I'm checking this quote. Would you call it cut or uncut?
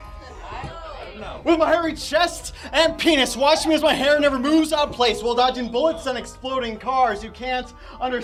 uncut